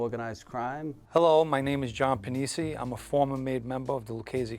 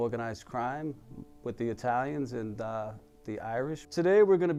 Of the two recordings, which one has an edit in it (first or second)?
first